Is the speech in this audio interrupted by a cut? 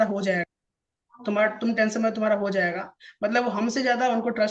no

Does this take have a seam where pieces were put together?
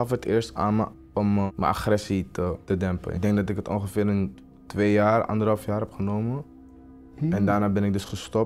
yes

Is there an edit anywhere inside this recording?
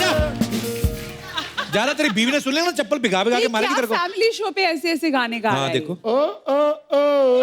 no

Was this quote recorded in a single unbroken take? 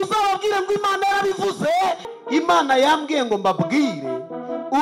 no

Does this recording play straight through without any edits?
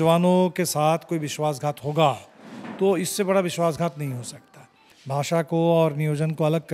no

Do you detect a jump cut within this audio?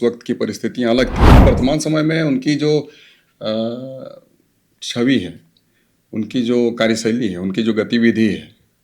yes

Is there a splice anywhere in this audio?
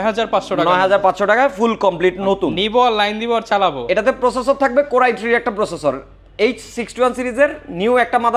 no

